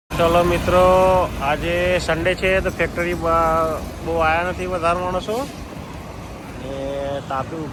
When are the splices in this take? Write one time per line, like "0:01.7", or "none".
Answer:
none